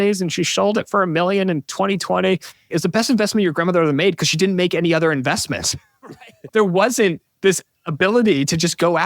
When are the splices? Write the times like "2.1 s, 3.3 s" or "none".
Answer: 2.7 s